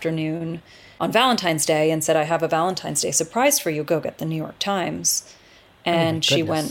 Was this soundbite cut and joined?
yes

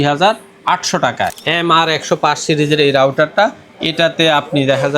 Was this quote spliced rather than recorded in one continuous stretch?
yes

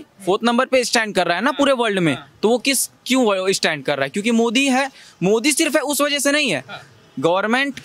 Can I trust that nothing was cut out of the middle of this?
yes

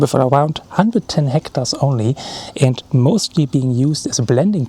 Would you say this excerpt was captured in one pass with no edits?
yes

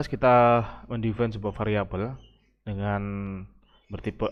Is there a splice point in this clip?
no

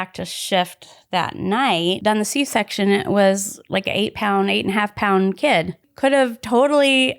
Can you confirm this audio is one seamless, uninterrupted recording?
no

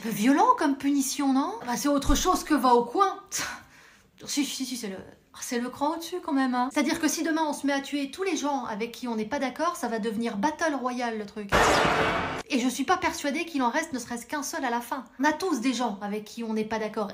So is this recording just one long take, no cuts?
no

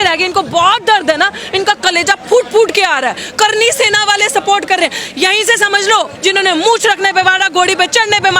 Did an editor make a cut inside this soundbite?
yes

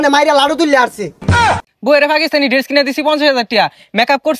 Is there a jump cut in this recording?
yes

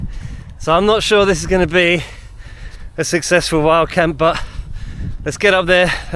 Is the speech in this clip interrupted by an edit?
no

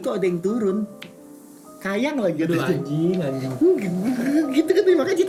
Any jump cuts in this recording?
no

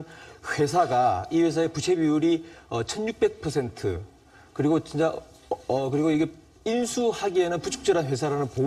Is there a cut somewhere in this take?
yes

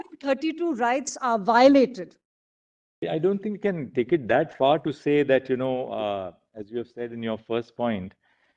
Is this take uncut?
no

